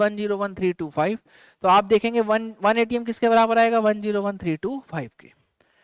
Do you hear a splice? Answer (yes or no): no